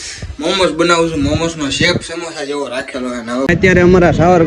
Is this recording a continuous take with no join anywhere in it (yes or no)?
no